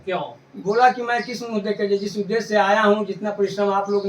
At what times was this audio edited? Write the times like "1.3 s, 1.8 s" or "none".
none